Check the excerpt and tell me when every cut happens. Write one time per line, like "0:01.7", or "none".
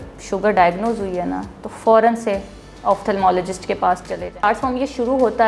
0:04.4